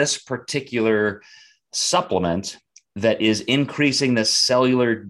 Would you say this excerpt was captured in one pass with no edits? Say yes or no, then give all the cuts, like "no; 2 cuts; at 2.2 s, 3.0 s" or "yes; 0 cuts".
yes; 0 cuts